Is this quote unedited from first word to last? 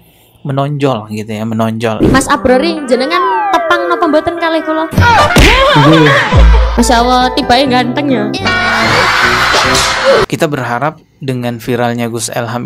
no; 2 cuts; at 2.0 s, 10.3 s

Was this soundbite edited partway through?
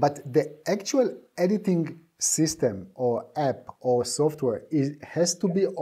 no; 0 cuts

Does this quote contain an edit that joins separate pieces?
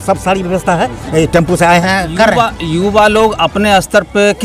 yes; 1 cut; at 1.8 s

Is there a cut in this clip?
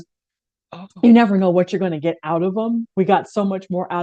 no; 0 cuts

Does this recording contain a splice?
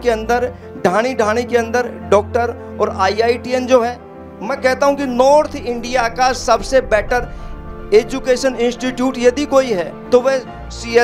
yes; 1 cut; at 9.9 s

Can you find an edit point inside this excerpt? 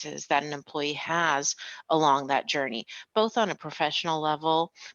no; 0 cuts

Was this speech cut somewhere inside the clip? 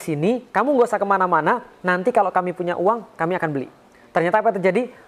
no; 0 cuts

